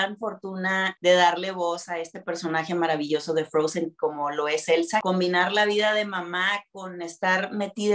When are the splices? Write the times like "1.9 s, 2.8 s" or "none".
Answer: 1.0 s, 5.0 s